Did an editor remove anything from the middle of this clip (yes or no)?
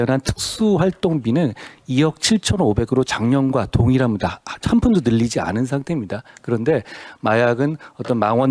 no